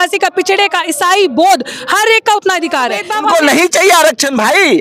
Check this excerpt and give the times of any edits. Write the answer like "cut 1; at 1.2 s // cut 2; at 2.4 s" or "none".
cut 1; at 3.1 s